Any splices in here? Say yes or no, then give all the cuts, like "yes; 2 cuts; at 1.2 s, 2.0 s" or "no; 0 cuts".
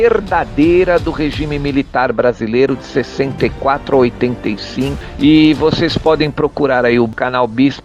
yes; 1 cut; at 5.0 s